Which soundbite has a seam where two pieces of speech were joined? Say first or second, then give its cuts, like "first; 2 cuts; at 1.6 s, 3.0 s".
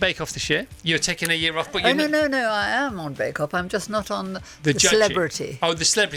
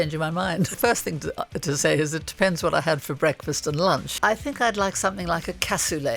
second; 2 cuts; at 0.8 s, 4.1 s